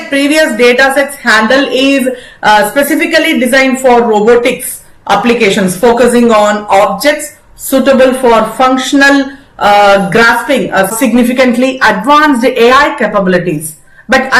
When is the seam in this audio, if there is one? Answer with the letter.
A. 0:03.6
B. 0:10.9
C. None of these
B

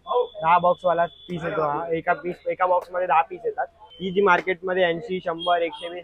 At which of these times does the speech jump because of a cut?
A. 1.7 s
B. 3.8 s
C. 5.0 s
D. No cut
B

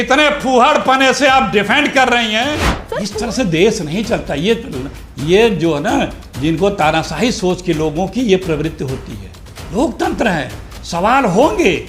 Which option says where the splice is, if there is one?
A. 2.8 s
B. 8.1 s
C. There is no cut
A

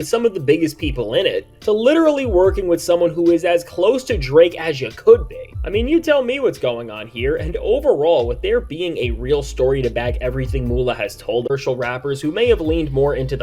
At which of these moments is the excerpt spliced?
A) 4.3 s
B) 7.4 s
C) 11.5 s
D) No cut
C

